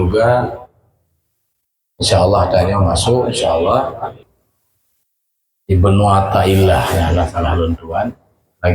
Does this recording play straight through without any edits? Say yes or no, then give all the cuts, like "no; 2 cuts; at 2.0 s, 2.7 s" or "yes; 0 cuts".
no; 1 cut; at 4.2 s